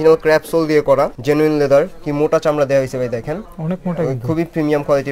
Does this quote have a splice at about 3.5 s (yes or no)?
yes